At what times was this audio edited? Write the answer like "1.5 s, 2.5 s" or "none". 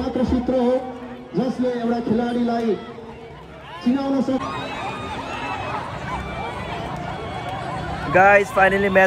4.4 s